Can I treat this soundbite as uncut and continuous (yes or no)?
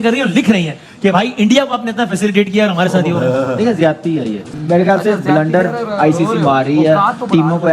no